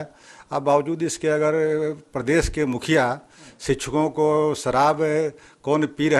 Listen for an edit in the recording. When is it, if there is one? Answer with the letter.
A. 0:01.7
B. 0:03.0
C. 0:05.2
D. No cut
D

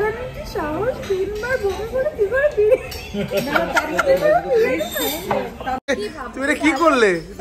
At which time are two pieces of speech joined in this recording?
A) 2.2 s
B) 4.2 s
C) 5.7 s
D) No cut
D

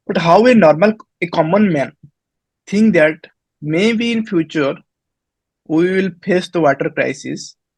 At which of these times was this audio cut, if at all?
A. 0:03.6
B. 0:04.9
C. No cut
C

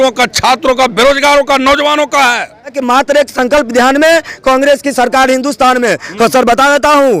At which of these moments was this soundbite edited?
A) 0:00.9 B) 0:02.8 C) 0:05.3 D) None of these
B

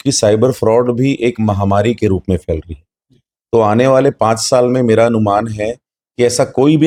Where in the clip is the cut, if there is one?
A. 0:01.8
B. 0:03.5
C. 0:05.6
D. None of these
D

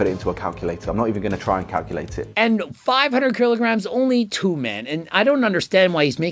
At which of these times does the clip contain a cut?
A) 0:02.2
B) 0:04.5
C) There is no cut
A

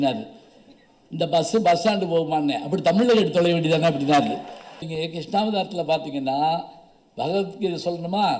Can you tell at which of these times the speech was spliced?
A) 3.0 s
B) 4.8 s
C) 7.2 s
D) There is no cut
B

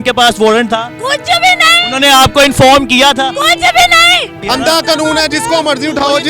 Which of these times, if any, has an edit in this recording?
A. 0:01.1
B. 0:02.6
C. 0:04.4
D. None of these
C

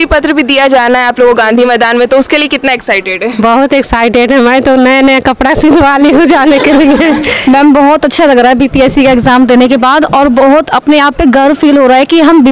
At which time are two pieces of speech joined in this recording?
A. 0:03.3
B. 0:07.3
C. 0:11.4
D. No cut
B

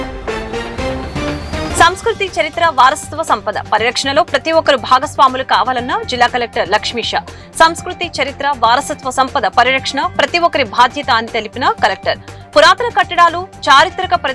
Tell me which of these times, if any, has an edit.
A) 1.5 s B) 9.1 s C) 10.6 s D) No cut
A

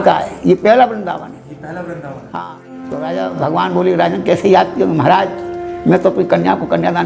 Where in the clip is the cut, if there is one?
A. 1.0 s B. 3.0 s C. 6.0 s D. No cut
B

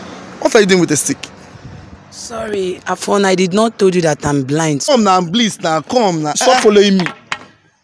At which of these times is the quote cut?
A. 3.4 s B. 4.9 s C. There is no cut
B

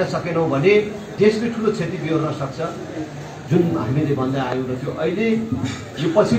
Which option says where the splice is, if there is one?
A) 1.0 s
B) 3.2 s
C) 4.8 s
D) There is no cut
A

